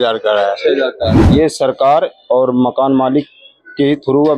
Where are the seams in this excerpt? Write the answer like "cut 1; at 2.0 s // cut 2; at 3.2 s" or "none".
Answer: cut 1; at 1.2 s